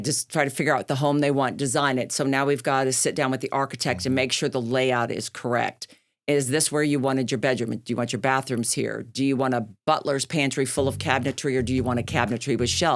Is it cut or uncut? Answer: uncut